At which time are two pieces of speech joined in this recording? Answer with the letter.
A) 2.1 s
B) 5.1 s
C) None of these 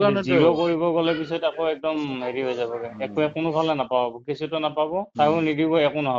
B